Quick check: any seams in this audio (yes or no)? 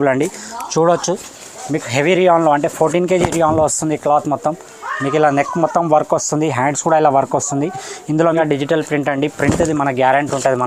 yes